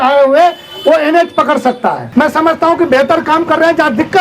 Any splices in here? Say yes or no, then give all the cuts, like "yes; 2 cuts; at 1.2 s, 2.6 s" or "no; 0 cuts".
yes; 1 cut; at 2.0 s